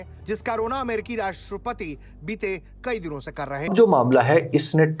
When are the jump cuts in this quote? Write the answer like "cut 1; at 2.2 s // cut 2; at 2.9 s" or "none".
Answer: cut 1; at 3.7 s